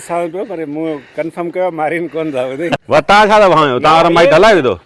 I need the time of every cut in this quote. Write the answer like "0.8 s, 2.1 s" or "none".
2.8 s